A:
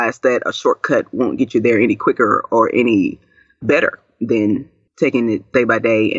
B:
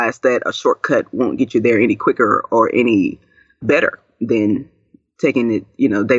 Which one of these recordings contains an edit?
A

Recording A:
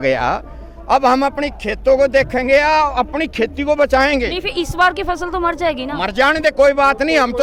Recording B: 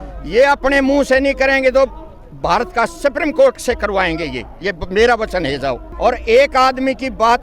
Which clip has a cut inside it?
B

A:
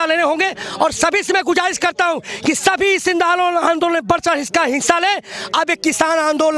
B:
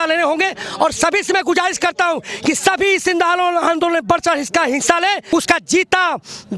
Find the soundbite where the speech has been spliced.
B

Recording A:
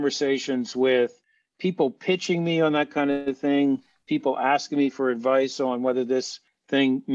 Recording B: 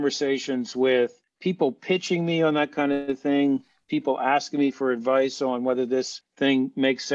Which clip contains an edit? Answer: B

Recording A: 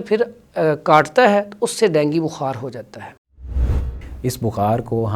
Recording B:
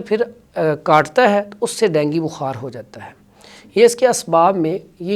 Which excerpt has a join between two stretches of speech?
A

